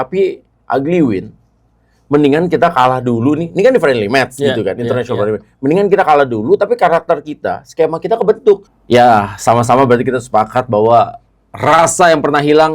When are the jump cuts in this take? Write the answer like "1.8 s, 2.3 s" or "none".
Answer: 8.7 s